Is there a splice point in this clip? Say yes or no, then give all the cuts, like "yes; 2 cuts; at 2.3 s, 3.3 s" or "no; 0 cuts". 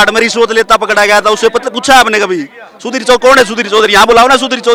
no; 0 cuts